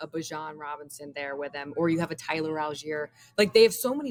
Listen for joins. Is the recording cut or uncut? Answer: uncut